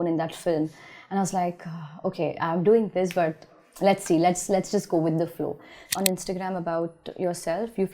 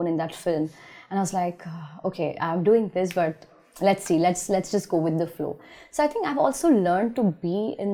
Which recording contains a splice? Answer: first; 1 cut; at 5.8 s

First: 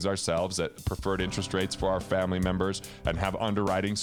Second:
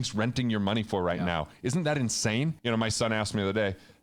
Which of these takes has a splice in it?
second; 1 cut; at 2.6 s

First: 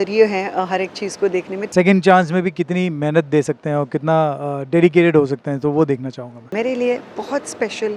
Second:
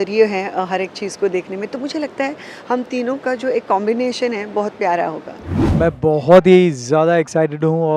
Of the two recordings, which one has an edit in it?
first; 2 cuts; at 1.6 s, 6.5 s

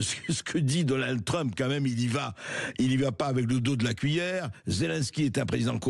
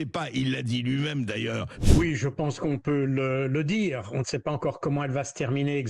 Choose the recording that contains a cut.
second; 1 cut; at 1.7 s

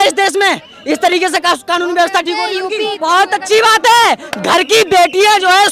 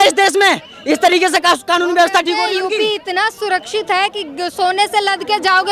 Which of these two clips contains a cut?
first; 1 cut; at 3.0 s

